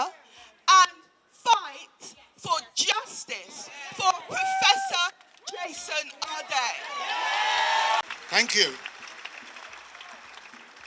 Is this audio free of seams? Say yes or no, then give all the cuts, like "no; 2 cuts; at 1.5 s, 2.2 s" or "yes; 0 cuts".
yes; 0 cuts